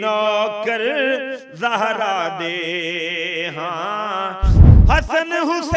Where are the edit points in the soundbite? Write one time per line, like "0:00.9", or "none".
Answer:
0:04.6